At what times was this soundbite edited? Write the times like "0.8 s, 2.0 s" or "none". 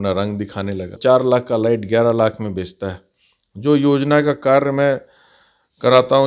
1.0 s